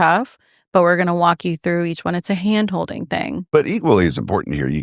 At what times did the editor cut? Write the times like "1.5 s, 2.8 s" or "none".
3.5 s